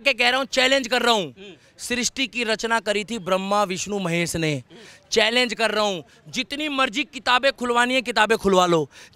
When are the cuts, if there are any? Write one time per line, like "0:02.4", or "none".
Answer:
none